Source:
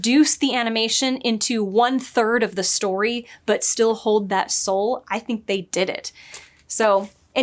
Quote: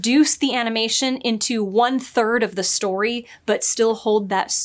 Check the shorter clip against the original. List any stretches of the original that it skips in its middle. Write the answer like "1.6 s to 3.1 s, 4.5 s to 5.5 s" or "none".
none